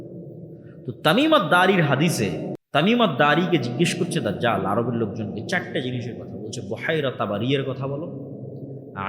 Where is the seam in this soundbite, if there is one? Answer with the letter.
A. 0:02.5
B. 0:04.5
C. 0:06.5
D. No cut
A